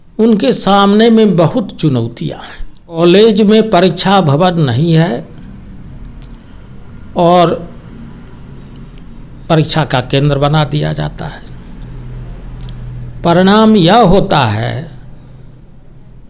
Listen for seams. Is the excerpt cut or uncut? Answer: cut